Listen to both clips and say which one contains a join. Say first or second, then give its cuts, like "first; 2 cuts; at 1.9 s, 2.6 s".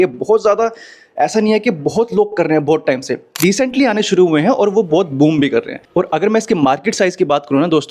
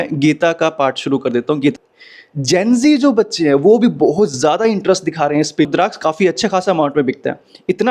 second; 2 cuts; at 1.7 s, 5.7 s